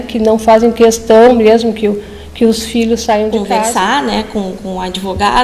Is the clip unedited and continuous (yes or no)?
no